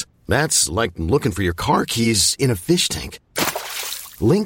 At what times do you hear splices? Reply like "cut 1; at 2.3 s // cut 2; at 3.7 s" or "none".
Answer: none